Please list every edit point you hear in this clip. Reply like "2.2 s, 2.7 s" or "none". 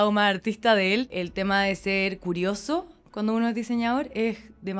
1.1 s